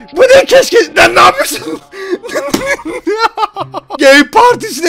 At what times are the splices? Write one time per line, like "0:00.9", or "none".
0:03.9